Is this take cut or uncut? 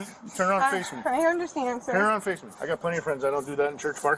cut